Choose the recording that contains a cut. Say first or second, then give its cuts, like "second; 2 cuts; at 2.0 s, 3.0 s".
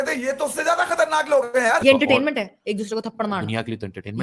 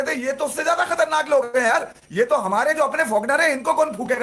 first; 1 cut; at 1.8 s